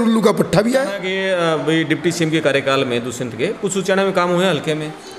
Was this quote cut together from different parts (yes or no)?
yes